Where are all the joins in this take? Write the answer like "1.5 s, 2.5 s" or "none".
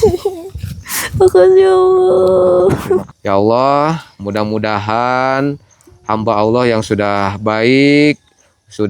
3.1 s